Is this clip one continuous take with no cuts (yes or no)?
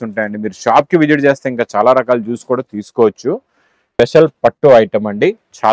no